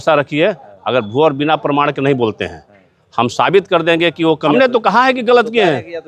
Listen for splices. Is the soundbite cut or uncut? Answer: cut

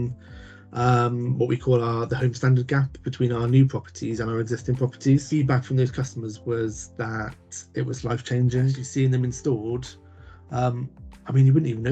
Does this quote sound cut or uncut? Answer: cut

